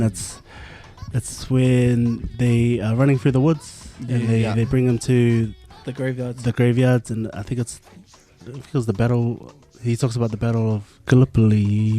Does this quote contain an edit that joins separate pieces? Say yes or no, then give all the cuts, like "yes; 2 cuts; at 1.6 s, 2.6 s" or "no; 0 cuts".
no; 0 cuts